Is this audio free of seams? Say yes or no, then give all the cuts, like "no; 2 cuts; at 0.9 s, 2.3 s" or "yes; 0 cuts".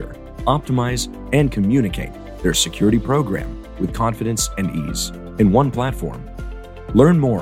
yes; 0 cuts